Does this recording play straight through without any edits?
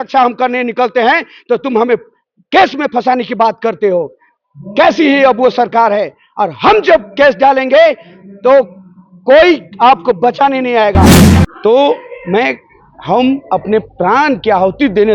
no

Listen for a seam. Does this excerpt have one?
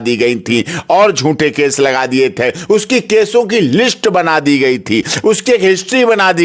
no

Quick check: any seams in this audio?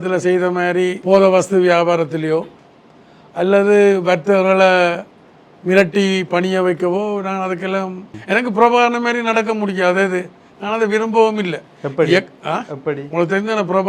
yes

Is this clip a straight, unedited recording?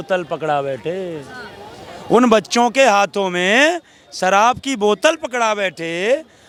yes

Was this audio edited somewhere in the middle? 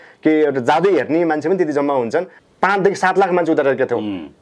yes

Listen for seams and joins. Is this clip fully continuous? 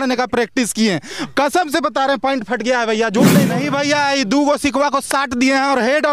no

